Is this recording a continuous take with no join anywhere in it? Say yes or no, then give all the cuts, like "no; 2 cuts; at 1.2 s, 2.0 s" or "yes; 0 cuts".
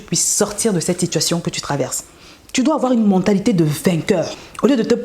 no; 1 cut; at 2.2 s